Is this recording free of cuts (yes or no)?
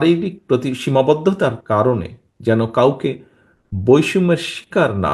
yes